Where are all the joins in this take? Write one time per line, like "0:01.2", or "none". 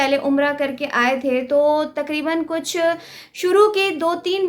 none